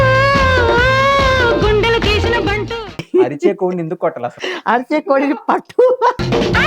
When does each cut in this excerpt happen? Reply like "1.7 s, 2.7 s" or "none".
3.1 s